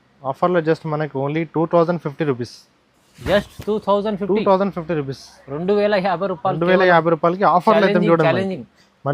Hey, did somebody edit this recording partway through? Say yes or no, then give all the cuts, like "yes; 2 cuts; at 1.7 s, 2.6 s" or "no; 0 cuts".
no; 0 cuts